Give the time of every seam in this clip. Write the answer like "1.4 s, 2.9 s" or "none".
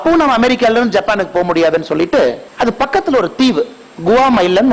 2.4 s